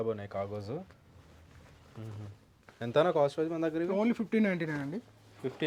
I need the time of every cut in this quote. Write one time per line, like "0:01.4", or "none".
none